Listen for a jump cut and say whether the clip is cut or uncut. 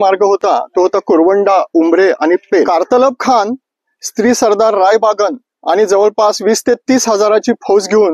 cut